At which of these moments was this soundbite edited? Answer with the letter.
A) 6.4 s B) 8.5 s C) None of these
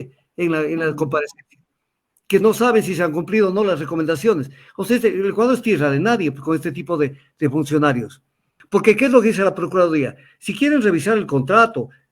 B